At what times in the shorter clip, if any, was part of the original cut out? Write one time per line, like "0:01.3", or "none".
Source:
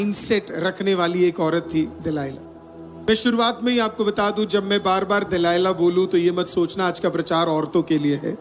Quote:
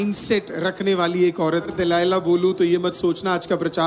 0:01.7